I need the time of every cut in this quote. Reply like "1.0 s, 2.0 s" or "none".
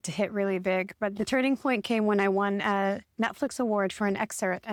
none